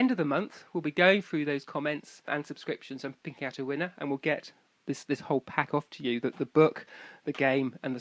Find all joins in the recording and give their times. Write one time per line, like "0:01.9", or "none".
0:02.3
0:03.2